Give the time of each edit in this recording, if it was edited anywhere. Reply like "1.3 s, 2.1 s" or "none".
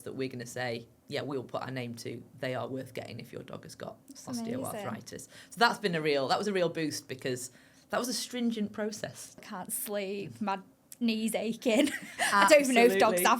9.4 s